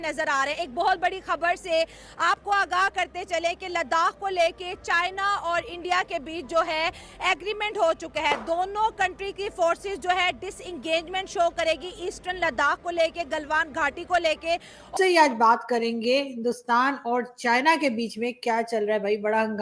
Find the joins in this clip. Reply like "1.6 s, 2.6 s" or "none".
14.9 s